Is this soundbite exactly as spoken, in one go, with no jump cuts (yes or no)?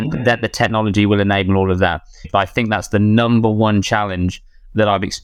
no